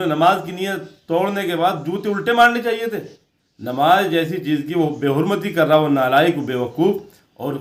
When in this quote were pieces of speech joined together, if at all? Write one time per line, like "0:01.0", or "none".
none

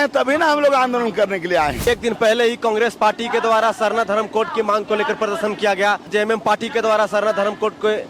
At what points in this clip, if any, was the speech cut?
0:01.9
0:06.1

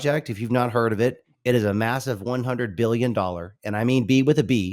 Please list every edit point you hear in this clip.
0:01.3

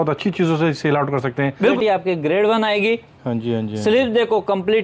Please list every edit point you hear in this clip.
0:01.7

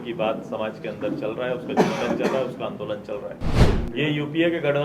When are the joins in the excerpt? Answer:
0:03.6

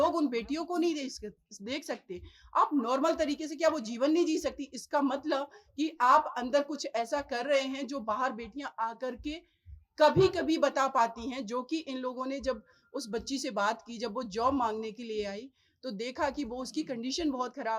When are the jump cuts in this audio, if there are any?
none

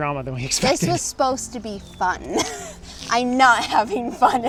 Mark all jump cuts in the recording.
none

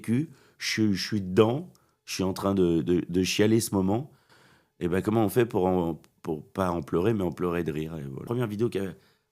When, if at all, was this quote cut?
0:08.2

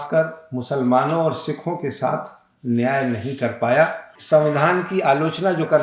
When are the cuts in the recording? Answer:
0:04.1

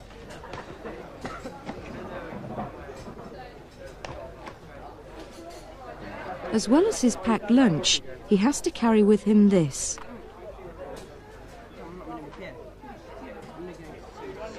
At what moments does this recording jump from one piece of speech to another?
none

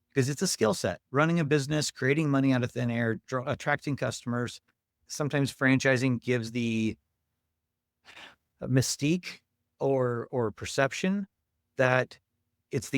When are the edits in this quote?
0:04.9

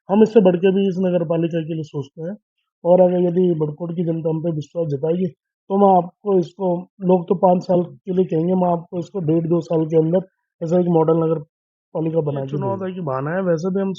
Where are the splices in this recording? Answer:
0:12.8

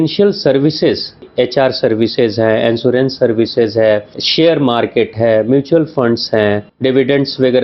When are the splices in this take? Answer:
0:01.3
0:04.2
0:06.7

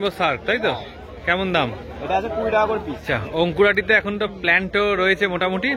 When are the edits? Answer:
0:03.1

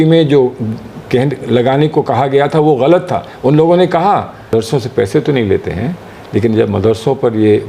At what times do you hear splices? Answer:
0:04.4

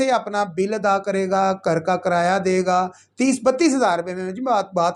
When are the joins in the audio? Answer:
none

